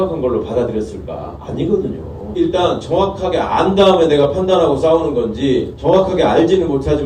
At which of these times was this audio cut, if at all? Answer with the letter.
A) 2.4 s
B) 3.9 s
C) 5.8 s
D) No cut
A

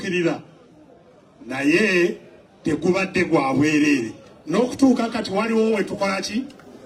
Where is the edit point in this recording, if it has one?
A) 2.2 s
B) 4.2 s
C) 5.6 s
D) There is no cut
D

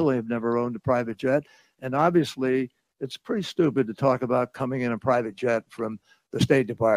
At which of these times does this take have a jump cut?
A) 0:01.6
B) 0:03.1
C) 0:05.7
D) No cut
C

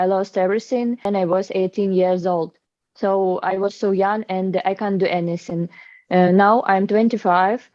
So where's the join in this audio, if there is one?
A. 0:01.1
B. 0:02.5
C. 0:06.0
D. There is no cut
A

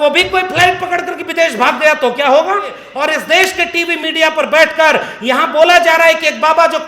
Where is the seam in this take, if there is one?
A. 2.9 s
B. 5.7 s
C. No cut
A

